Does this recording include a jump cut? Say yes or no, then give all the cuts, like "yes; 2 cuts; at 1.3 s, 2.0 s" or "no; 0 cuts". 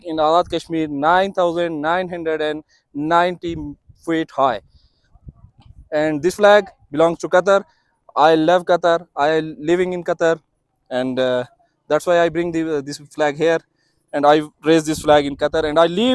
no; 0 cuts